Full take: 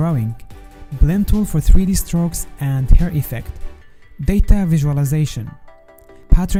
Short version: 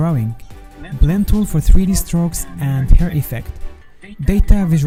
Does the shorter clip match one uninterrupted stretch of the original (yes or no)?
yes